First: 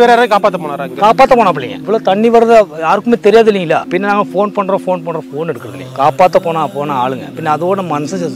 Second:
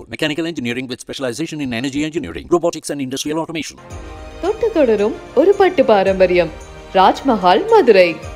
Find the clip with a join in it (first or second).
first